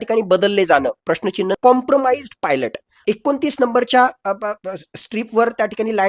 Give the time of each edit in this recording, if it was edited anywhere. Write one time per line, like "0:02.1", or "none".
0:01.5
0:03.0